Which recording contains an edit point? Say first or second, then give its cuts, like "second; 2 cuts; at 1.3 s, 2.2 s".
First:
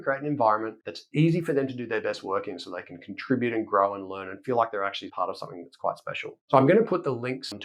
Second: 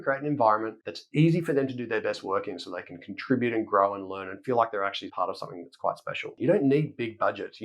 second; 1 cut; at 6.3 s